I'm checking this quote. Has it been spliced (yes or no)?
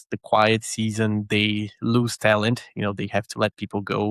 no